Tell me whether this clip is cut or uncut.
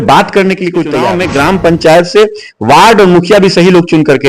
cut